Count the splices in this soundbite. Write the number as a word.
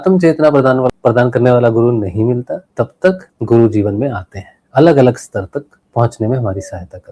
three